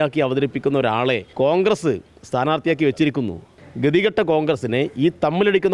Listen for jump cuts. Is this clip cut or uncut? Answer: cut